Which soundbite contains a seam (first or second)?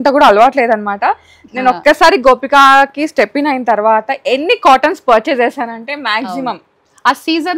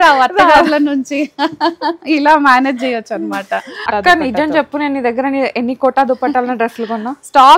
second